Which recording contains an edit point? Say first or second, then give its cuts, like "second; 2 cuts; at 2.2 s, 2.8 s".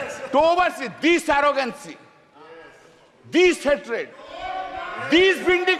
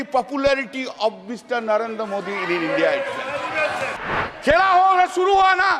second; 1 cut; at 4.0 s